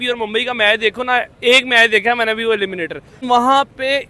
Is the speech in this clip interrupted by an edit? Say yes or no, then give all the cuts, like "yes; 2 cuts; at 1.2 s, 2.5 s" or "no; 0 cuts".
yes; 1 cut; at 3.2 s